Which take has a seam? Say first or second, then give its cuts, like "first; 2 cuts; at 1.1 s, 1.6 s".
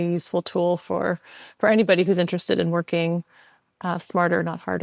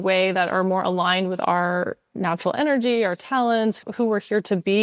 second; 1 cut; at 3.8 s